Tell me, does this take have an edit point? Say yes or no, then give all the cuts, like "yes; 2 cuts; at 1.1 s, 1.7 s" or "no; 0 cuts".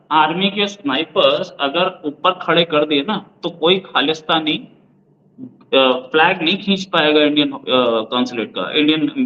no; 0 cuts